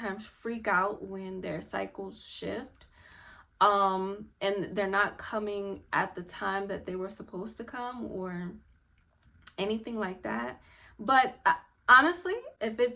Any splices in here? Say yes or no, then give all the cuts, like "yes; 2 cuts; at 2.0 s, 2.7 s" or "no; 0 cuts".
no; 0 cuts